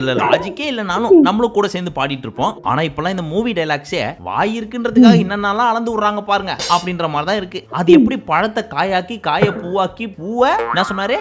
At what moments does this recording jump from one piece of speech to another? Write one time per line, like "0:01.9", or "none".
none